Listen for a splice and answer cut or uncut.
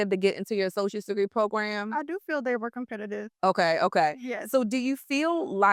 uncut